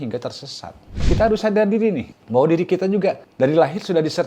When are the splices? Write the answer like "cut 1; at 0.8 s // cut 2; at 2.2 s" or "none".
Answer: cut 1; at 1.1 s // cut 2; at 2.1 s // cut 3; at 3.3 s